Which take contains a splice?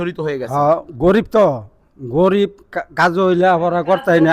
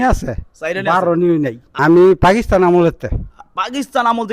second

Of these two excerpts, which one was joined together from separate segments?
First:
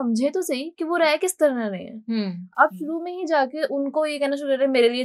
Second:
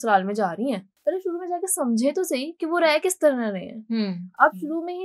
second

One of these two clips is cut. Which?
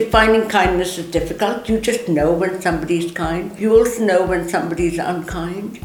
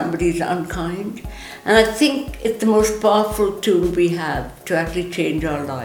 first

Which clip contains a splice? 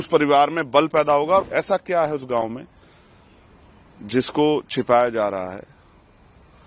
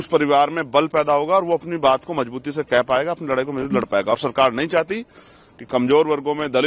first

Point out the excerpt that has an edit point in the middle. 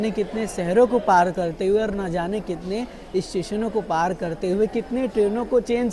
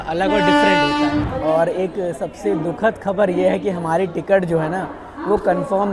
second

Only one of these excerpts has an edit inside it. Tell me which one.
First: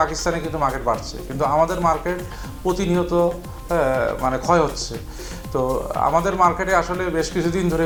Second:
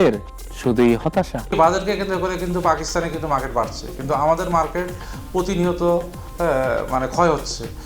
second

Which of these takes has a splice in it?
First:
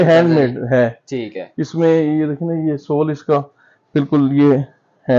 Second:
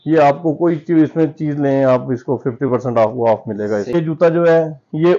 second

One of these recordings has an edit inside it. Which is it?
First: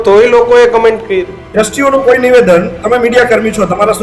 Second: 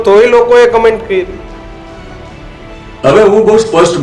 first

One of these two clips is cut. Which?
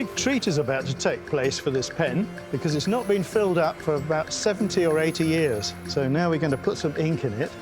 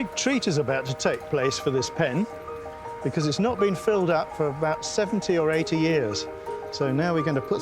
first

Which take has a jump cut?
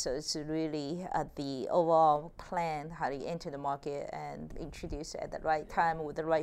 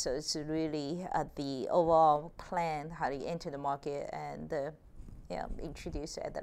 first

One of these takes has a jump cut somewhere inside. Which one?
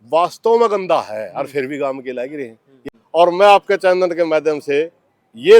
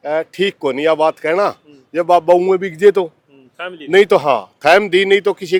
first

